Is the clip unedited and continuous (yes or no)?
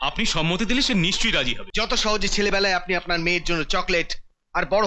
no